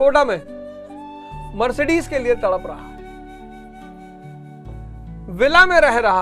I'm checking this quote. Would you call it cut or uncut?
cut